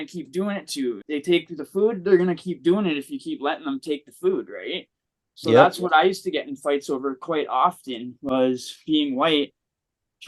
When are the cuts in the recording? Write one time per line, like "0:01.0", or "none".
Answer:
0:01.0